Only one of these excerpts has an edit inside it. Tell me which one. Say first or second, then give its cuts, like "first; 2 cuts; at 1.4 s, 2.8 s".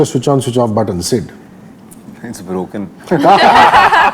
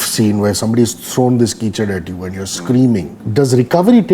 second; 1 cut; at 3.2 s